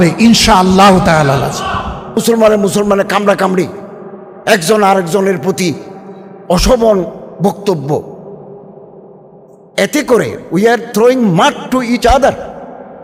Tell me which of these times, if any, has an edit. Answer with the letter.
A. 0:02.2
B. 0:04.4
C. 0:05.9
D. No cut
A